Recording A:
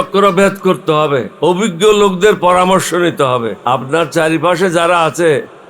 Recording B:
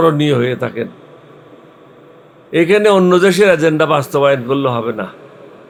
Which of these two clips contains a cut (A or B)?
A